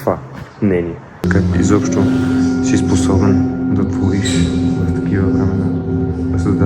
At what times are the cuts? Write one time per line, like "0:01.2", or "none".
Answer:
0:01.2